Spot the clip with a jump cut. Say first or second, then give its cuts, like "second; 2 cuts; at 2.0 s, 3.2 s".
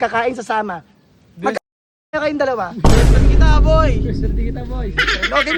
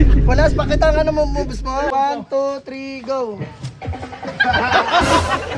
second; 1 cut; at 1.9 s